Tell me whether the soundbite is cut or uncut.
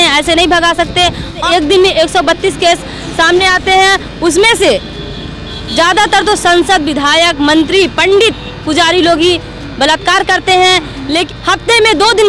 cut